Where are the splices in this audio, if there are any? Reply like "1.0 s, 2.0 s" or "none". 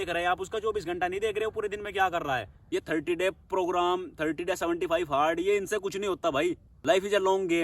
2.5 s, 6.7 s